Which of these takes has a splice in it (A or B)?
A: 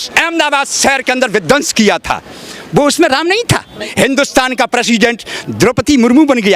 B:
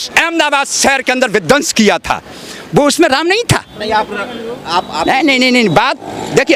A